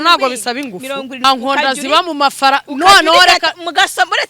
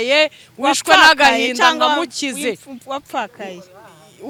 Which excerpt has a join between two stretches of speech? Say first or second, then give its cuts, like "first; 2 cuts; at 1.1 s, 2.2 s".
first; 1 cut; at 1.2 s